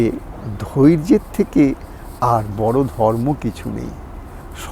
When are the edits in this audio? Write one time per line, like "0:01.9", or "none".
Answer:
none